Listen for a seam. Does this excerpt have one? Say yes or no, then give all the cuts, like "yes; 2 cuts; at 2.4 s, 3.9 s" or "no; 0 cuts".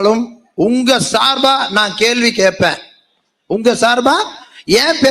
no; 0 cuts